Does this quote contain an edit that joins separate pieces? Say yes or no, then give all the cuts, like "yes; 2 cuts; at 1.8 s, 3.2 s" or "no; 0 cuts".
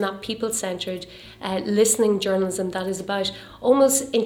no; 0 cuts